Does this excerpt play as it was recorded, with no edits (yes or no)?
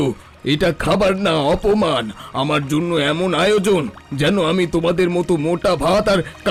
yes